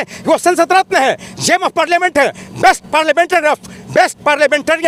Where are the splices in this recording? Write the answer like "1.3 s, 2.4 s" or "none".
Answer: none